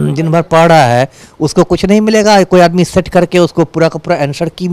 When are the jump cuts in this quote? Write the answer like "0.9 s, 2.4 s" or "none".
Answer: none